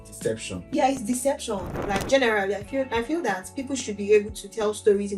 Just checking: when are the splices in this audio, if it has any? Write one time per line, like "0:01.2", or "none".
0:01.7

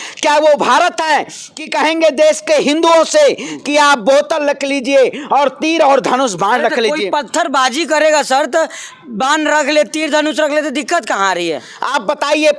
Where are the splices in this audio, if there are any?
none

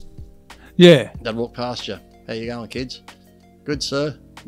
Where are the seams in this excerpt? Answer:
none

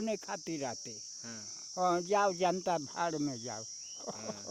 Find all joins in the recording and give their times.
none

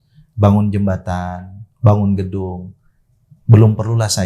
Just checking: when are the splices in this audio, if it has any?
none

